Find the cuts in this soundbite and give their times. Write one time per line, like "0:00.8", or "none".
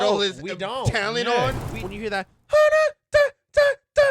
0:01.9